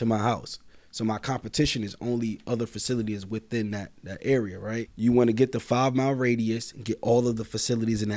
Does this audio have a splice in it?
yes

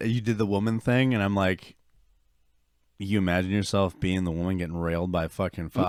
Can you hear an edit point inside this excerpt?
no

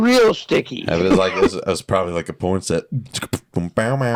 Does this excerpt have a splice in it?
no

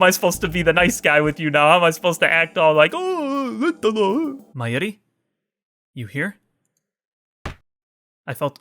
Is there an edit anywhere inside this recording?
yes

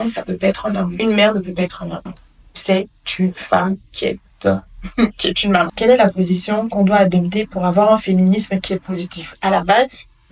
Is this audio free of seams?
no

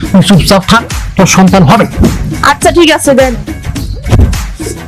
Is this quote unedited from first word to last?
yes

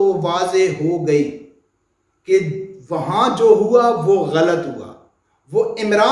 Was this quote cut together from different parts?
no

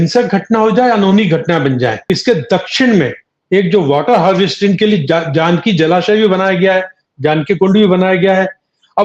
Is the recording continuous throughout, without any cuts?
no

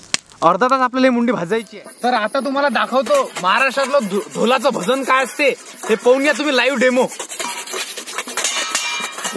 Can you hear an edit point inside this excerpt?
yes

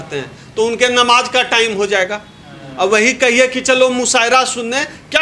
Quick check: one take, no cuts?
yes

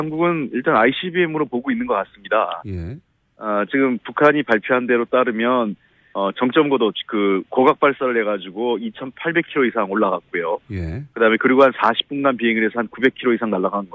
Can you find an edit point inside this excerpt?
no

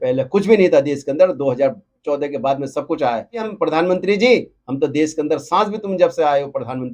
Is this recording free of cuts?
no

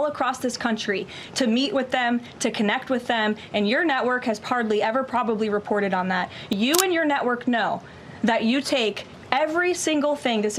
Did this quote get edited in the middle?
yes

